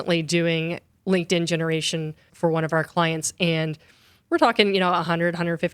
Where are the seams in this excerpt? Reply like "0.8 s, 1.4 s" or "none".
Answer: 2.3 s